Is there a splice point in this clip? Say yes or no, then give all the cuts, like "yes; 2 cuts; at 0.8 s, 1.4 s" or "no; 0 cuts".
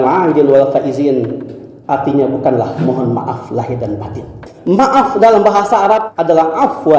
yes; 2 cuts; at 4.4 s, 6.1 s